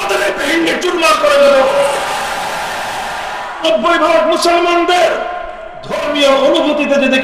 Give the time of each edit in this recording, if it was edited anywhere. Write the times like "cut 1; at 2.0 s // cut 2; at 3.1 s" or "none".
cut 1; at 3.6 s